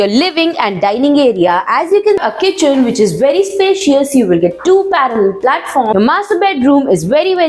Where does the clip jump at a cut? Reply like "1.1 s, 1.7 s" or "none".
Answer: 2.2 s, 5.9 s